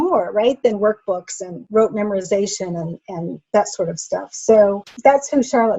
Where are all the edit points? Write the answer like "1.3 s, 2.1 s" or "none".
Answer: 4.9 s